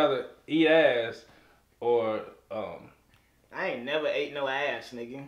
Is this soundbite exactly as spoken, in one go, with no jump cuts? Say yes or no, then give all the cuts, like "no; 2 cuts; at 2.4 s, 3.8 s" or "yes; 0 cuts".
yes; 0 cuts